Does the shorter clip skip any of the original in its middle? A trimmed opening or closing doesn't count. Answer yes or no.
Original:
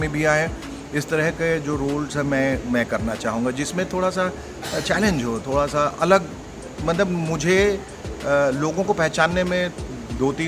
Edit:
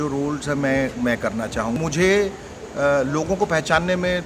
yes